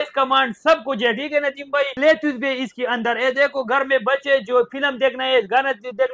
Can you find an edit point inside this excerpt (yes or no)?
yes